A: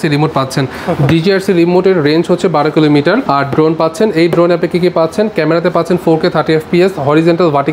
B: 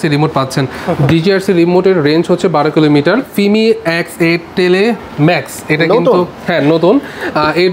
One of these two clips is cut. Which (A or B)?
B